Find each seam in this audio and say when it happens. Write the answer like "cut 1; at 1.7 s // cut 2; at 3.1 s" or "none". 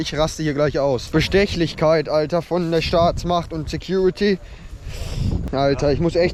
none